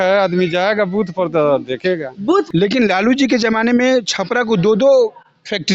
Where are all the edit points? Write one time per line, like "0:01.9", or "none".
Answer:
0:02.4